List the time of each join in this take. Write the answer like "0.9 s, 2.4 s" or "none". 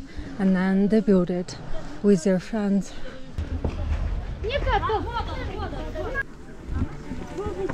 3.5 s, 6.2 s

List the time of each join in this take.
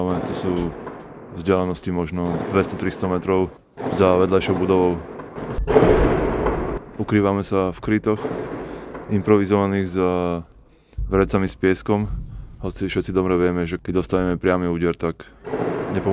3.7 s

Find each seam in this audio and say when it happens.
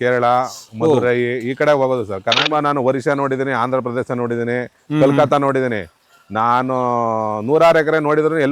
2.4 s

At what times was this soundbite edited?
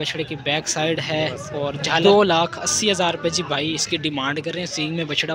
2.0 s

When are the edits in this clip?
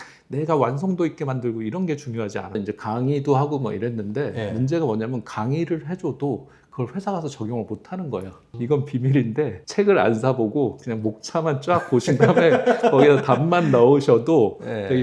2.6 s, 8.4 s

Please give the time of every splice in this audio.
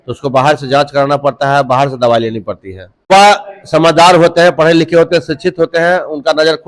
3.1 s

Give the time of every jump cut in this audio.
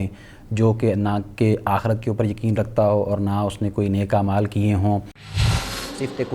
5.4 s

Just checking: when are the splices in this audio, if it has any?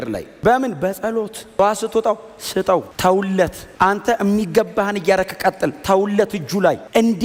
none

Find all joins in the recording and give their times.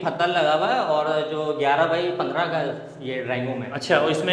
none

